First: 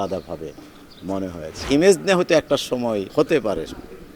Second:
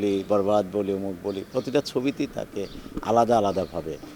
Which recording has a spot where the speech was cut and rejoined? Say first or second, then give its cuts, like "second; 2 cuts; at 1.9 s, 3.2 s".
first; 2 cuts; at 1.7 s, 3.1 s